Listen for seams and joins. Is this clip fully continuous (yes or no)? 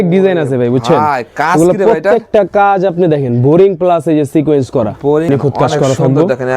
no